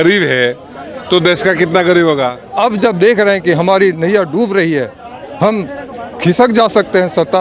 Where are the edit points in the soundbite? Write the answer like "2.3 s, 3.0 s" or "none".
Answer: 2.4 s